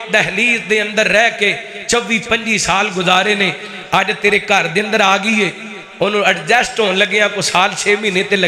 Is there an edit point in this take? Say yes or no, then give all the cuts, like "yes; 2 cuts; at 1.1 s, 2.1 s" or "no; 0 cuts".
no; 0 cuts